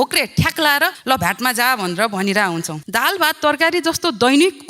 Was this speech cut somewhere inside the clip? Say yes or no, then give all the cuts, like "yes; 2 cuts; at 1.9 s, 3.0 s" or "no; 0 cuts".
yes; 2 cuts; at 1.0 s, 2.8 s